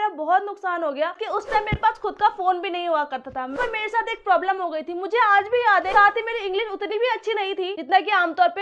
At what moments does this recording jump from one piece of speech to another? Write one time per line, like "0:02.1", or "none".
0:01.2
0:03.6
0:05.9